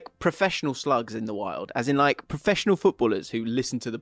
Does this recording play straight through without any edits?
yes; 0 cuts

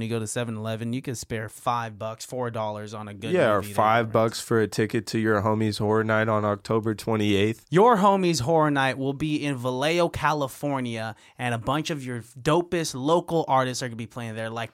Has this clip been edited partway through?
yes; 1 cut; at 7.6 s

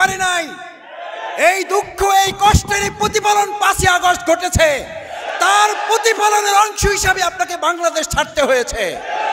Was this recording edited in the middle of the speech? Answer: no; 0 cuts

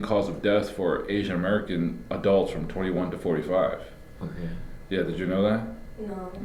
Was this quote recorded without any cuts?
yes; 0 cuts

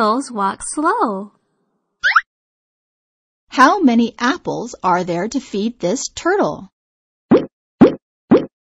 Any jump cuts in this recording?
no; 0 cuts

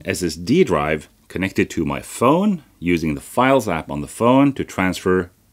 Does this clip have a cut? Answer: no; 0 cuts

